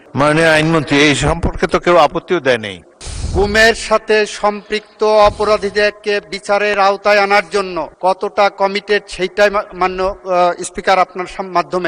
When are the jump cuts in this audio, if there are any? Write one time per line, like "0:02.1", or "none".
0:03.1